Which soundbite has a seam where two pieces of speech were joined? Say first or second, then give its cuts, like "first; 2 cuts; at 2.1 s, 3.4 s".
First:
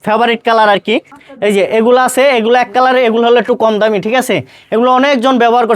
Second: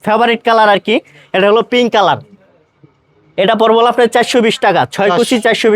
first; 1 cut; at 1.2 s